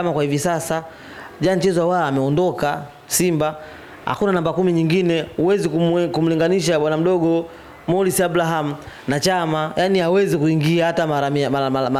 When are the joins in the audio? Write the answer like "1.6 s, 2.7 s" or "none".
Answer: none